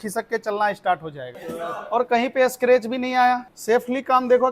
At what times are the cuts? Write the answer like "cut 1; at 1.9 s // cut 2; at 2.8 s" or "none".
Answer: cut 1; at 1.3 s